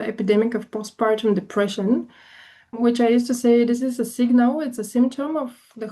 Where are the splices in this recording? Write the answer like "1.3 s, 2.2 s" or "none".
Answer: 2.7 s